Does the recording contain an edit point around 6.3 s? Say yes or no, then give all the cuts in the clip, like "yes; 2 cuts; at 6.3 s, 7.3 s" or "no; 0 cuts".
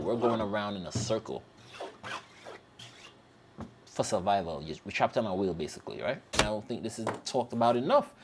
yes; 1 cut; at 6.3 s